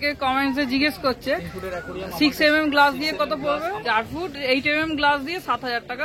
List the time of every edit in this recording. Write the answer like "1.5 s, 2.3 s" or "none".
3.8 s